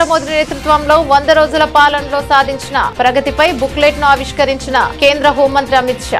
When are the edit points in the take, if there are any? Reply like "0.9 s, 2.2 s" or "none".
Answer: none